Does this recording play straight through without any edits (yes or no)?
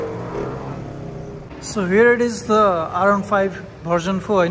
no